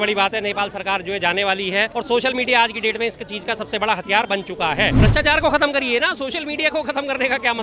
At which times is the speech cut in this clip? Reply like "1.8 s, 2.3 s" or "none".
1.9 s, 4.9 s